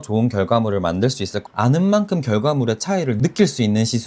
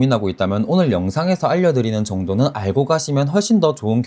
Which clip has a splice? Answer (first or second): first